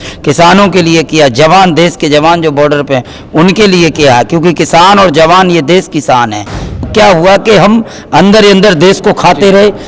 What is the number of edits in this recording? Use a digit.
1